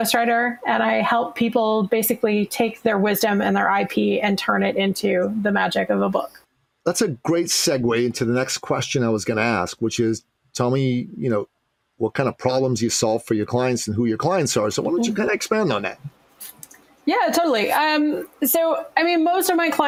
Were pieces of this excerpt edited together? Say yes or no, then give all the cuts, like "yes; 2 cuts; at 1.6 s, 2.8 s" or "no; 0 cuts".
no; 0 cuts